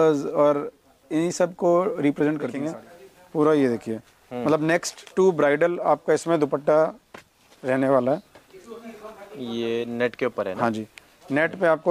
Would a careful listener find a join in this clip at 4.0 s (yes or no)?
no